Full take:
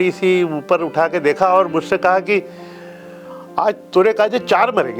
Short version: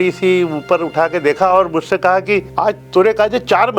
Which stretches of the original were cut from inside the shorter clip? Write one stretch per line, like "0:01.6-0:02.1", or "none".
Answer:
0:02.5-0:03.5